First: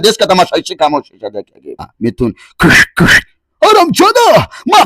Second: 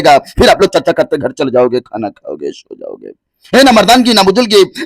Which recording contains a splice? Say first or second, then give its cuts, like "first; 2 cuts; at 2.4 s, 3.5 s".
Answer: first; 1 cut; at 1.9 s